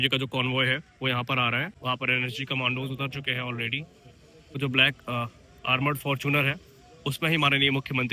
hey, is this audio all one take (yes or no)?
no